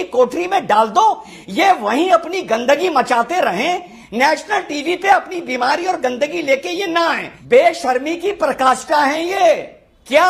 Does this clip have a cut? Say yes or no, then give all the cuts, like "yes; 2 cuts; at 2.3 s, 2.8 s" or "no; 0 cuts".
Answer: no; 0 cuts